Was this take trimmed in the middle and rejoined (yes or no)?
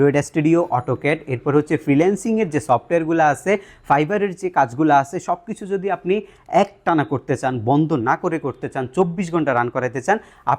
no